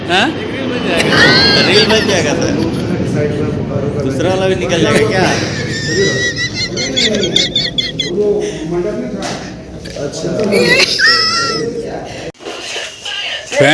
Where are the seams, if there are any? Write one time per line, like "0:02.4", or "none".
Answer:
none